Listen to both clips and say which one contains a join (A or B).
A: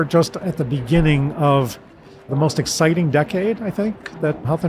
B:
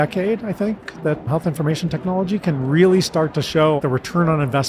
B